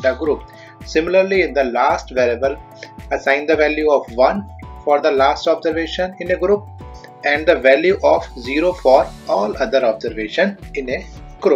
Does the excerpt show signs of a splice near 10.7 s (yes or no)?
yes